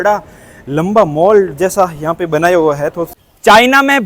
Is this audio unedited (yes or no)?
no